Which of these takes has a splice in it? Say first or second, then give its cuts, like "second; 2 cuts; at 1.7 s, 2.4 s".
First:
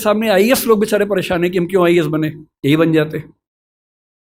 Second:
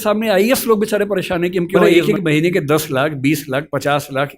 second; 1 cut; at 1.9 s